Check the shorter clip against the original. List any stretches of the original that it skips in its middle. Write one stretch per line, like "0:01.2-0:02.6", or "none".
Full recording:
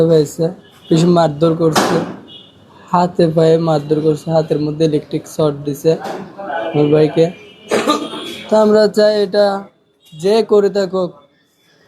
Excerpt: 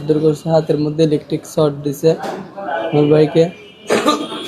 none

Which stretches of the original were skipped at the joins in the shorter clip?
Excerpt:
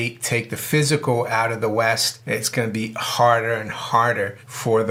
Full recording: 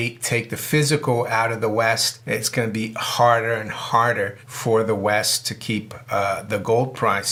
none

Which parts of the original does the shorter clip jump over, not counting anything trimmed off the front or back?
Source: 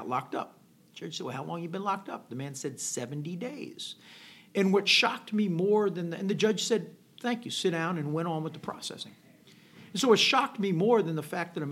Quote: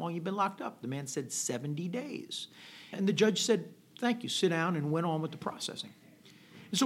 0:04.4-0:06.1

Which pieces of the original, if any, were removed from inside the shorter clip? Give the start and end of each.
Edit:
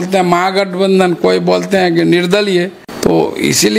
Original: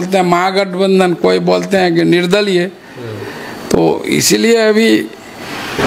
0:02.8-0:03.5

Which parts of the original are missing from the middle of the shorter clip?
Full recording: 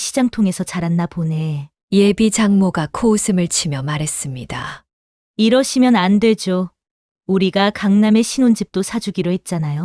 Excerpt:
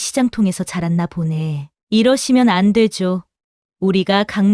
0:01.7-0:05.1

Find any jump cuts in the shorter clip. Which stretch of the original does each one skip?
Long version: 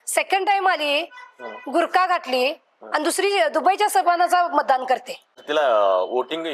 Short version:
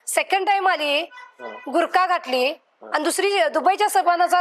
none

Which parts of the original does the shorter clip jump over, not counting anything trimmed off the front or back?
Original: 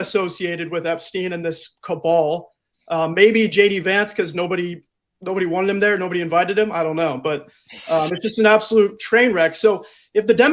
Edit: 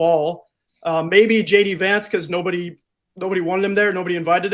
none

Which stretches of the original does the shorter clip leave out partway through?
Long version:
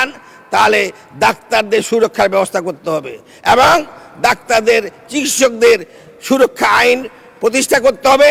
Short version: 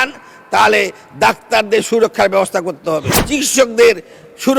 0:03.2-0:05.0

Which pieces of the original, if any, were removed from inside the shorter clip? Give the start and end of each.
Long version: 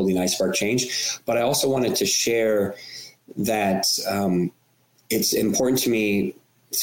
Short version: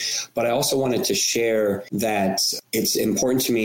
0:03.2-0:04.7

